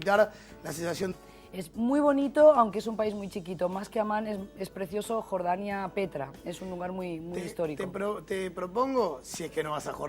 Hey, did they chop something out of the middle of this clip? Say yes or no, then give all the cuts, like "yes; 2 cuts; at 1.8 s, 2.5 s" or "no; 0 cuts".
no; 0 cuts